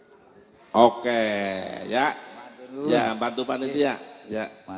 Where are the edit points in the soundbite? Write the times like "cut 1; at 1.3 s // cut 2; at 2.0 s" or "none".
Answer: none